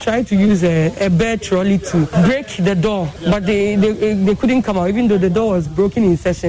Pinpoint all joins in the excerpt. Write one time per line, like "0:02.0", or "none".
0:02.1
0:03.2